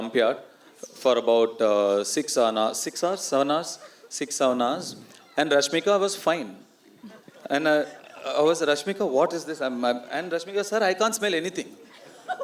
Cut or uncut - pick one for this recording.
uncut